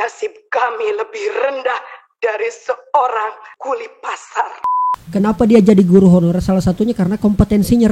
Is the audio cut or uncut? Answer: cut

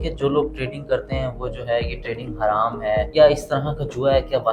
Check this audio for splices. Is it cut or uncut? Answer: cut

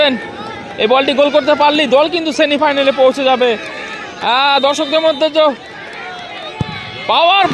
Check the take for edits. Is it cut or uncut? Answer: uncut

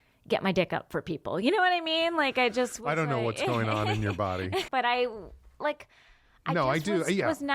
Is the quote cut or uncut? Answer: cut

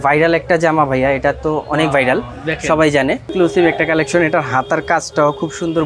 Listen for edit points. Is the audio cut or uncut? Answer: uncut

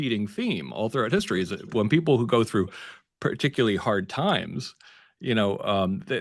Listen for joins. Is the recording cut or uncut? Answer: uncut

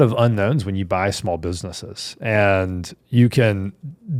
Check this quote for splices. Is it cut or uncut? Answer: uncut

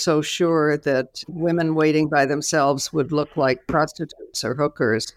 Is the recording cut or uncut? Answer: uncut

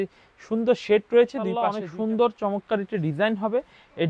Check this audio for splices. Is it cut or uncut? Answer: cut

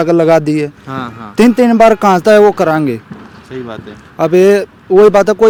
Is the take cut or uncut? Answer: uncut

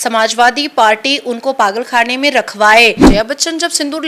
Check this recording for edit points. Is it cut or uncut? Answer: cut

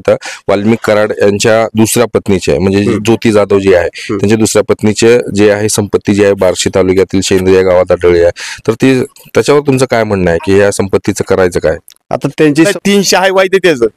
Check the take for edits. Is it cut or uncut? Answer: cut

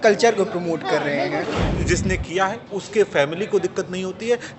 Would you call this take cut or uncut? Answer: cut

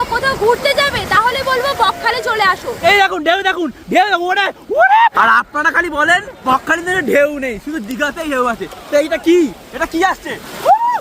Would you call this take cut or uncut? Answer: cut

